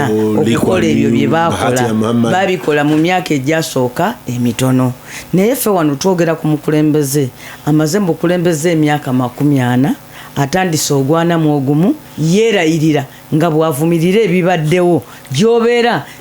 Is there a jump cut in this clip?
no; 0 cuts

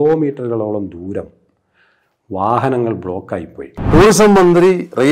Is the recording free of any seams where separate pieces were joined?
no; 1 cut; at 3.7 s

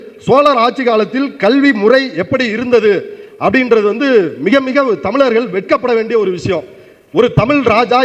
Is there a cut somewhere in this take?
no; 0 cuts

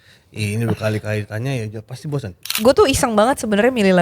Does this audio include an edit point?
yes; 1 cut; at 2.4 s

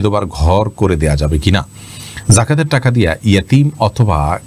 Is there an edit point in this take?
no; 0 cuts

